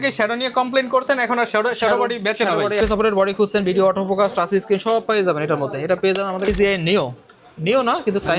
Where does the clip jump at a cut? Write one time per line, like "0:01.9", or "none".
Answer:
0:02.8
0:06.5